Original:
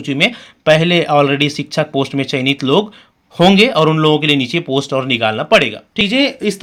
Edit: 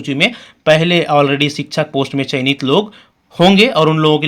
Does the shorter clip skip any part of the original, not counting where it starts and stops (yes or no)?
no